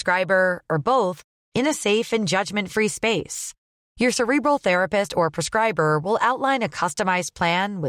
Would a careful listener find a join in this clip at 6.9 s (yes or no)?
no